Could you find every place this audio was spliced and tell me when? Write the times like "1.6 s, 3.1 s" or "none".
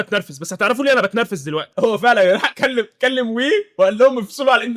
1.7 s